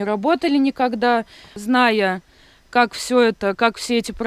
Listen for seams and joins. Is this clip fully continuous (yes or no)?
no